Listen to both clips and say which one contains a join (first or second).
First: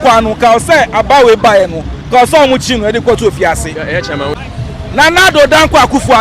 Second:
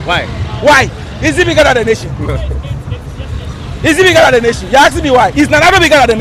first